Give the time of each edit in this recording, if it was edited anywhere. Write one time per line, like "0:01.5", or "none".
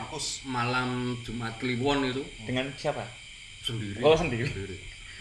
none